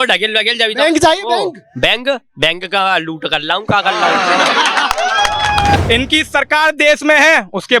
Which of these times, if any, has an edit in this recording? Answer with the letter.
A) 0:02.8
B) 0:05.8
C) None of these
B